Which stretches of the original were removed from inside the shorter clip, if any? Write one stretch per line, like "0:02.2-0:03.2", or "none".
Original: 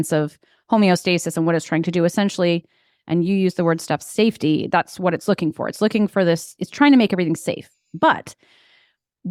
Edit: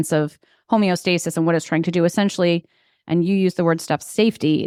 none